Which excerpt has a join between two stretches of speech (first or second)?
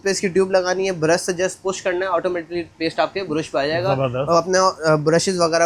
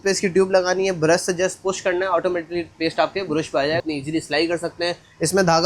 second